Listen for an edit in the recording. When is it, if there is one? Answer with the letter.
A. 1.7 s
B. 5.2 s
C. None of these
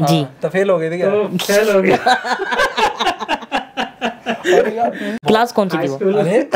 B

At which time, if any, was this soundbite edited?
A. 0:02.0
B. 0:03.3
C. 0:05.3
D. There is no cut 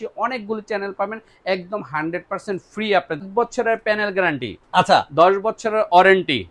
B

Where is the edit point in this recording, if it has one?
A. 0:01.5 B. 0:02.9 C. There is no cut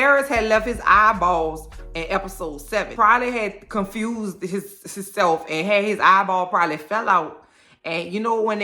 B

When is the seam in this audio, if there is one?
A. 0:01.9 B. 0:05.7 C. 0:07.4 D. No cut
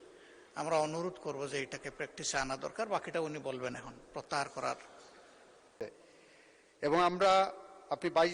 B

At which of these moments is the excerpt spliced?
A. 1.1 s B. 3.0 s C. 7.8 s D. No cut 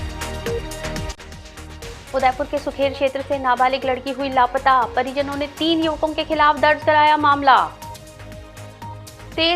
A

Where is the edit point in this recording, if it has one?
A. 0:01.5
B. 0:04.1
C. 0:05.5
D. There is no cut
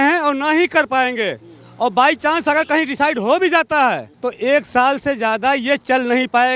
B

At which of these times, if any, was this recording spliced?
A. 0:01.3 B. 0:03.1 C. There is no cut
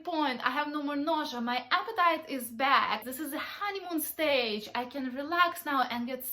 B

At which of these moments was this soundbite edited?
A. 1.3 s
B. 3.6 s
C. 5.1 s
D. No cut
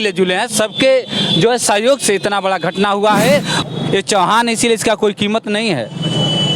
B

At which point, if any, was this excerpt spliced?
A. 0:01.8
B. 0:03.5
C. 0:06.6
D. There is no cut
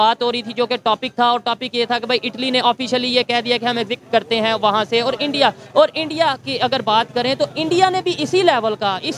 D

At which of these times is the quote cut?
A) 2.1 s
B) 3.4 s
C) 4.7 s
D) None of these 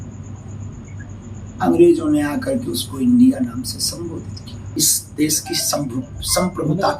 C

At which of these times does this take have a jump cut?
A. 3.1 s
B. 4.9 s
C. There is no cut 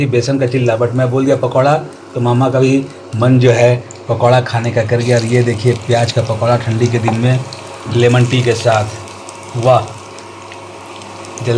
C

